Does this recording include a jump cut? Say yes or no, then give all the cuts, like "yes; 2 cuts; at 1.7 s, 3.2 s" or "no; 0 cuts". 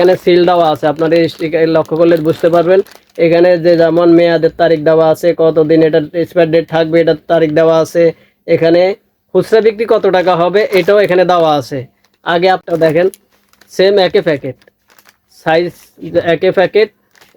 yes; 1 cut; at 12.6 s